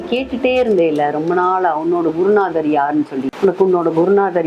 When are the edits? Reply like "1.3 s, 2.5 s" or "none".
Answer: 3.3 s